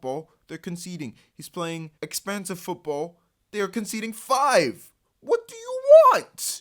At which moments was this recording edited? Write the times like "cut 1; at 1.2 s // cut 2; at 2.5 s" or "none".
cut 1; at 1.9 s